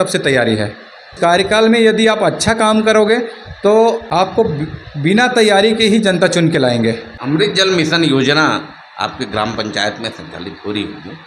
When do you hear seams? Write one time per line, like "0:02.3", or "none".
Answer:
0:01.1
0:04.0
0:07.1

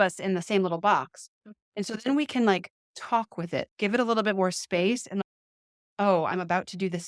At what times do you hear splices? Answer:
none

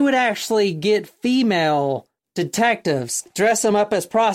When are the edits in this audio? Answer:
0:02.2
0:03.3

